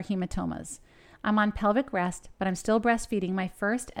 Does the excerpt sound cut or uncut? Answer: uncut